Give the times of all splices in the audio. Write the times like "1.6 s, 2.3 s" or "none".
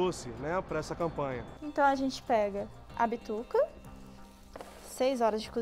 1.5 s